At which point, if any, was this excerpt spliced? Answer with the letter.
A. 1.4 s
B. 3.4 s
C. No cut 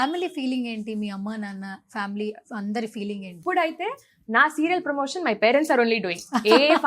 B